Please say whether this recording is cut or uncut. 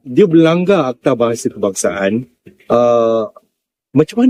uncut